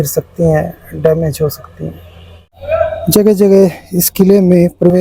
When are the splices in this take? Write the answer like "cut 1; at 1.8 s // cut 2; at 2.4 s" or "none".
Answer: cut 1; at 2.5 s